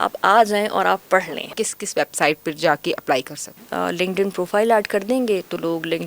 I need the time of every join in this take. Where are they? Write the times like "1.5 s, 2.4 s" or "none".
1.4 s, 3.6 s